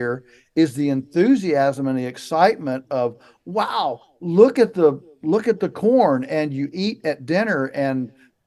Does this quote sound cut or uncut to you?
uncut